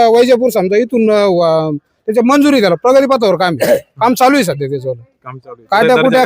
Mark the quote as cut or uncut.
uncut